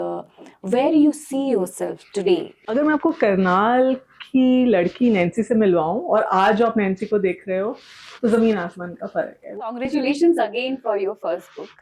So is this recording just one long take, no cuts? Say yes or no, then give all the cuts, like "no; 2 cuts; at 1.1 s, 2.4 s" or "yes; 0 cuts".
no; 2 cuts; at 2.6 s, 9.6 s